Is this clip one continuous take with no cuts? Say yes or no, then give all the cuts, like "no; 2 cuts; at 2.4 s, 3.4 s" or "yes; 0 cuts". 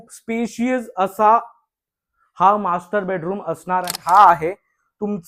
no; 1 cut; at 4.0 s